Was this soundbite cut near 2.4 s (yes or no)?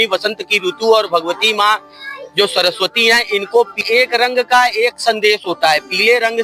no